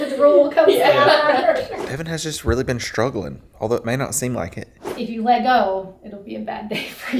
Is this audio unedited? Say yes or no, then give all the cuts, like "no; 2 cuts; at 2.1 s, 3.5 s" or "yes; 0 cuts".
no; 2 cuts; at 1.8 s, 4.9 s